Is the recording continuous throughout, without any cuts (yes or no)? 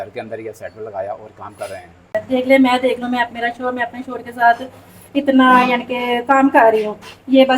no